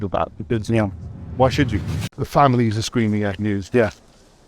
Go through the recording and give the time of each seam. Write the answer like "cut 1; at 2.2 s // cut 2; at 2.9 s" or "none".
cut 1; at 2.1 s